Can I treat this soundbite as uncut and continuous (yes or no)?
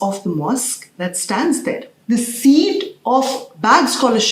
no